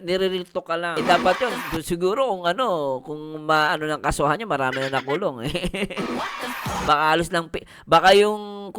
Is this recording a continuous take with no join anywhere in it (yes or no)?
no